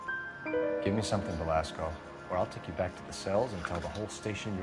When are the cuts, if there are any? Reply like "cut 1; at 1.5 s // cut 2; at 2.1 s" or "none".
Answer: none